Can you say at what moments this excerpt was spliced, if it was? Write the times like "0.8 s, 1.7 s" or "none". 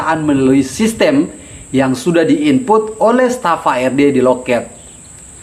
none